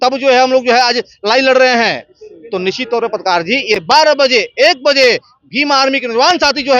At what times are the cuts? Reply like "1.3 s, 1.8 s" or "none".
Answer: 3.7 s